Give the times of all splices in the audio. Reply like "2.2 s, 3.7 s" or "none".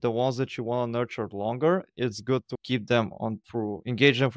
3.5 s